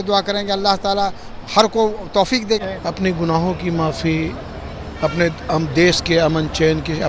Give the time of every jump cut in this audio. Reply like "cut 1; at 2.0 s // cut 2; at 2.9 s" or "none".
cut 1; at 2.6 s